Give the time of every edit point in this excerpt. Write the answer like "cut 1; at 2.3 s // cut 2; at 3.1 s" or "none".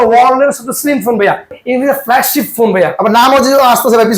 cut 1; at 1.6 s